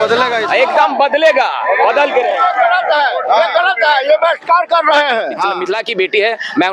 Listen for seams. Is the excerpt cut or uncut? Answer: cut